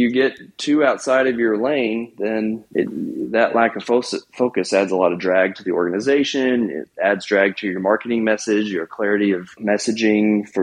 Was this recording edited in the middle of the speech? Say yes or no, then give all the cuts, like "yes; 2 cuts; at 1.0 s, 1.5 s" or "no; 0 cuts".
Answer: yes; 2 cuts; at 2.6 s, 9.6 s